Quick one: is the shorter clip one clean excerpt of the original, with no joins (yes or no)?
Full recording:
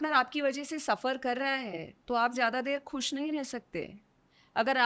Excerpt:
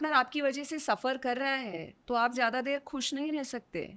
yes